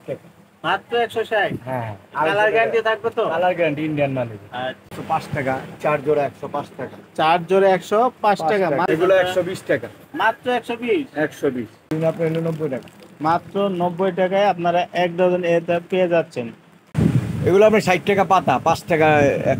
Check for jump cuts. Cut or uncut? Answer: cut